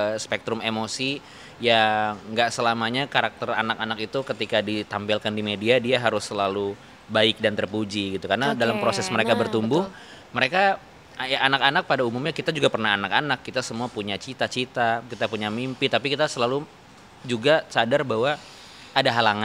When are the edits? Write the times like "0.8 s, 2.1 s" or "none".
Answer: none